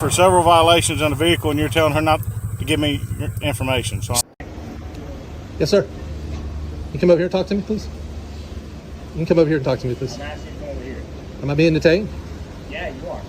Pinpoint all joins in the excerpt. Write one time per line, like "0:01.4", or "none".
0:04.3